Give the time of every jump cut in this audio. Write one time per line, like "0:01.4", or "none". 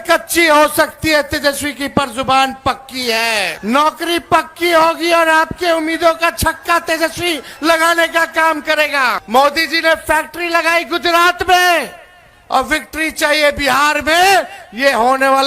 0:03.5
0:09.2

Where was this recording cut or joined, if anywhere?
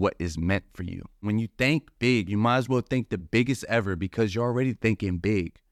0:01.2

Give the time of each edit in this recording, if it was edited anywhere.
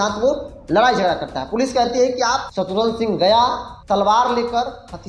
0:02.5
0:03.7

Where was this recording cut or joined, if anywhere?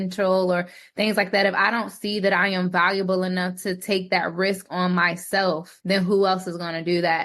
0:05.7

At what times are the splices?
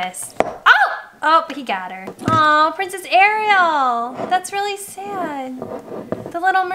0:02.1

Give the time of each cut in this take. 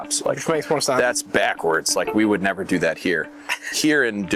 none

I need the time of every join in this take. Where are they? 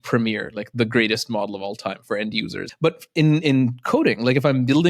0:02.6

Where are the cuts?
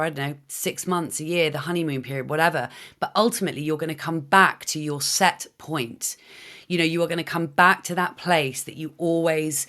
none

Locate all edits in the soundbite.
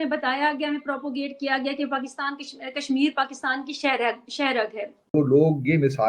0:05.1

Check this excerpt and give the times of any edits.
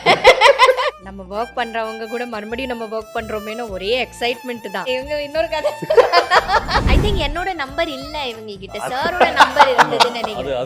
0:01.0
0:04.9
0:06.9

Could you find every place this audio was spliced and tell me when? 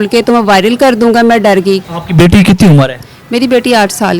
0:01.9

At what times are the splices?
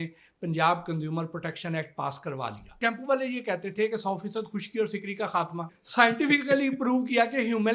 0:02.8
0:05.8

